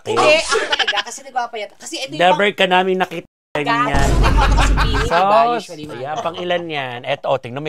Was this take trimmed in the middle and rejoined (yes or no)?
no